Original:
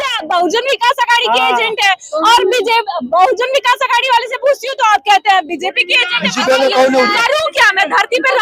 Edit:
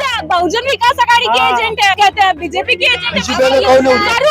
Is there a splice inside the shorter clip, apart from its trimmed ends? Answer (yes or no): yes